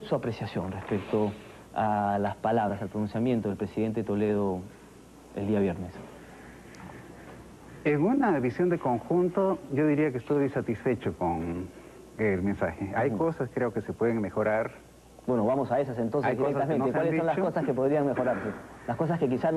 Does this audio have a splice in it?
yes; 1 cut; at 4.6 s

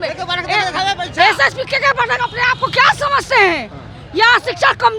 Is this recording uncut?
yes; 0 cuts

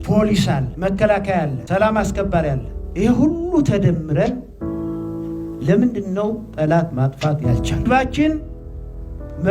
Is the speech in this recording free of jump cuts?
no; 1 cut; at 7.8 s

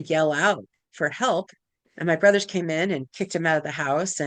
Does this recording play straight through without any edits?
yes; 0 cuts

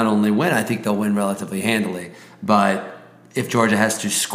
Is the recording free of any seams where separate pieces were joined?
yes; 0 cuts

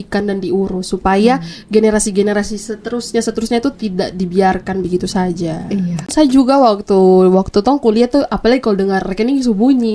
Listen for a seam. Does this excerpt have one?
yes; 1 cut; at 6.1 s

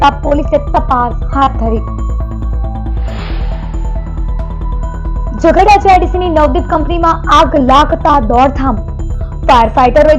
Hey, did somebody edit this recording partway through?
no; 0 cuts

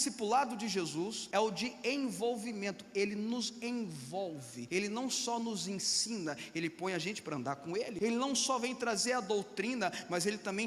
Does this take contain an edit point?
yes; 3 cuts; at 1.2 s, 4.6 s, 7.9 s

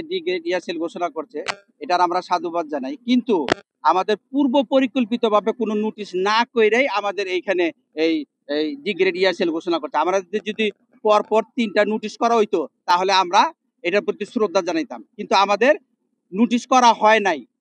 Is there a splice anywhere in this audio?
no; 0 cuts

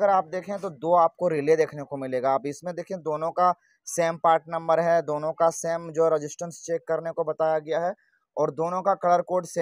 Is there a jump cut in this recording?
no; 0 cuts

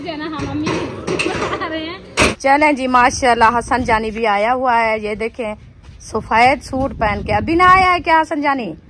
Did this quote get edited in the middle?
yes; 1 cut; at 2.3 s

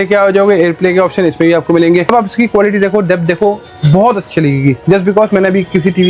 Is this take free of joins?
no; 1 cut; at 2.1 s

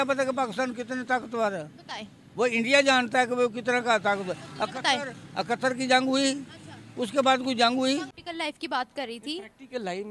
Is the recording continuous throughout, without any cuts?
no; 1 cut; at 8.1 s

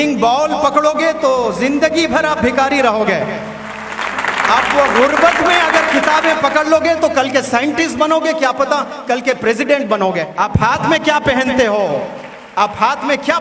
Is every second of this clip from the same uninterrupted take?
no; 1 cut; at 10.3 s

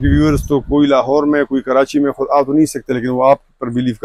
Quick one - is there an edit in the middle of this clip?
no; 0 cuts

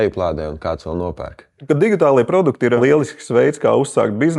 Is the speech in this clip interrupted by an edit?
yes; 2 cuts; at 1.6 s, 2.8 s

